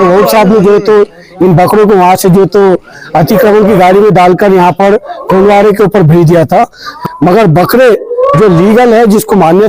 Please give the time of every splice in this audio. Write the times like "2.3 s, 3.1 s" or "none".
6.9 s

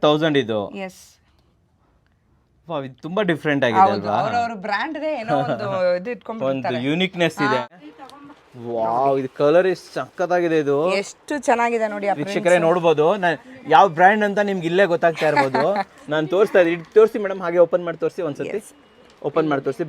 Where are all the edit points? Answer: 7.7 s

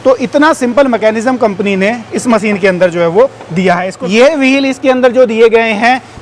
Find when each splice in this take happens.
3.9 s

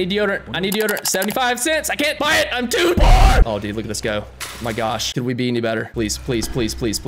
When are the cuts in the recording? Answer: 3.4 s, 5.1 s, 5.9 s

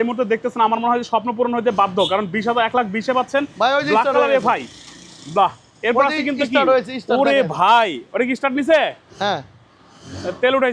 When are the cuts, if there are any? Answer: none

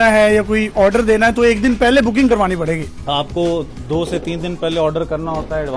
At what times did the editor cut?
none

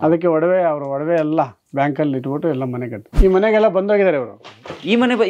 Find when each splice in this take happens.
3.1 s

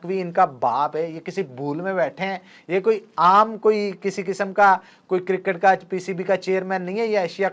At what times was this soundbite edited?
3.1 s

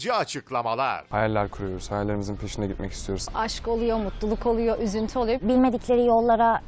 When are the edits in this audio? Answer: none

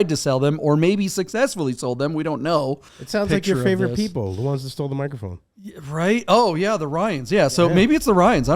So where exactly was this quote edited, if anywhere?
2.9 s

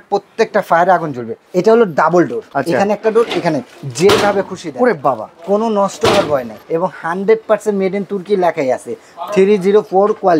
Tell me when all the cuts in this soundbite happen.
1.3 s, 2.5 s, 6.6 s

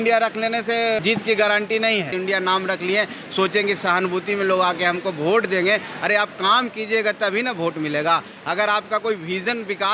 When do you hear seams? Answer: 1.0 s, 2.1 s

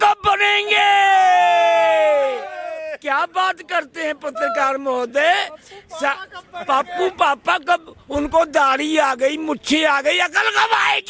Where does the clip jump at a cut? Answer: none

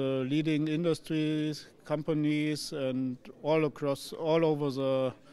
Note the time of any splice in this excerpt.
none

